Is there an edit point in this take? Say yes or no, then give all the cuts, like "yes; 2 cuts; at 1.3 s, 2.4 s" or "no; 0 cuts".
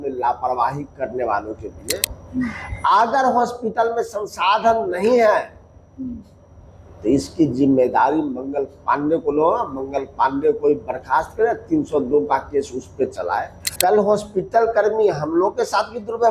yes; 1 cut; at 13.7 s